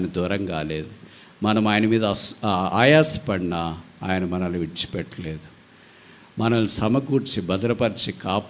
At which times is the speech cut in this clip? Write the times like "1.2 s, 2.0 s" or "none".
none